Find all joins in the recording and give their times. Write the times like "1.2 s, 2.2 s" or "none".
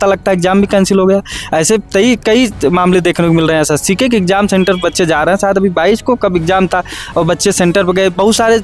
none